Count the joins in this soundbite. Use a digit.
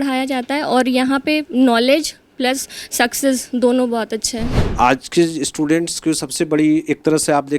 1